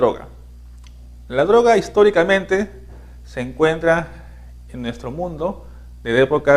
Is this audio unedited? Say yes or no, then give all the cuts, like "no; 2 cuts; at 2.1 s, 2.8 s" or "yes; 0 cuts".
yes; 0 cuts